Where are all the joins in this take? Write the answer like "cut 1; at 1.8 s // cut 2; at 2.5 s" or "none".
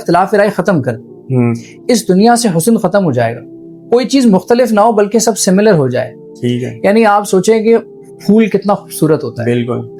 none